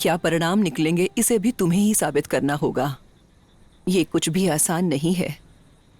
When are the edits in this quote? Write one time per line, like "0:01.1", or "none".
none